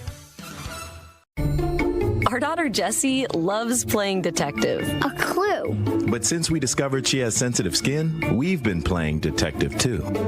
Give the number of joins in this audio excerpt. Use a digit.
1